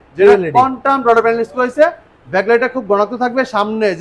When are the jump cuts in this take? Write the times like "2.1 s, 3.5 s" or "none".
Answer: none